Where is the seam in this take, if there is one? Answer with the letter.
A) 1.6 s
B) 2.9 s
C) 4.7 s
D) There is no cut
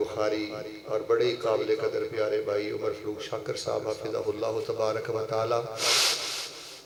D